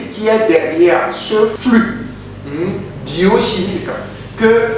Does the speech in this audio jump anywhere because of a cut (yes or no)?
yes